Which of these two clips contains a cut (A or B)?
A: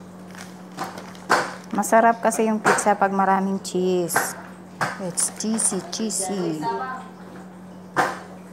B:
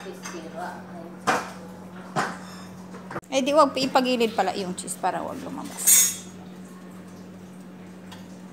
B